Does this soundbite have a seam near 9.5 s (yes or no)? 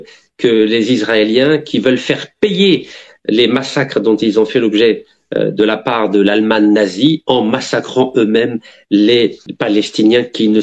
yes